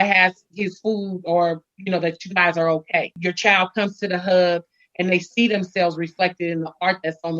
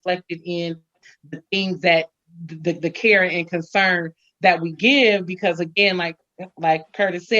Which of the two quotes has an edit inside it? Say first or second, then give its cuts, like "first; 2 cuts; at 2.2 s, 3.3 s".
first; 1 cut; at 3.1 s